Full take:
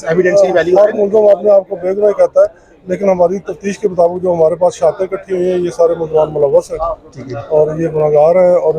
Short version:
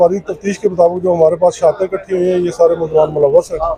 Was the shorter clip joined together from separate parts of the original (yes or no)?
no